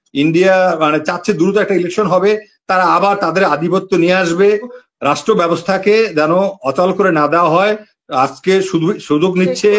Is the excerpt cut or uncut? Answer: cut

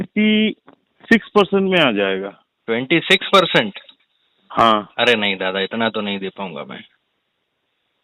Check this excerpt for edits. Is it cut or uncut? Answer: uncut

